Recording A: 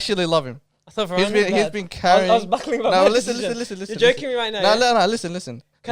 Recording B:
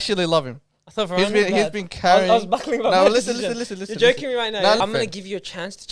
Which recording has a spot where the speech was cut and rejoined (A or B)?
B